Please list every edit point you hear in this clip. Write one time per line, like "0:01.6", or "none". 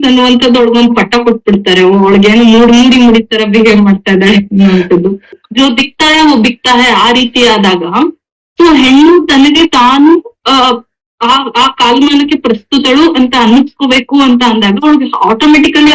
0:05.4